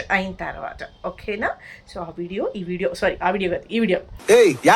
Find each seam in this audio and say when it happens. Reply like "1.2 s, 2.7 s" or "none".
none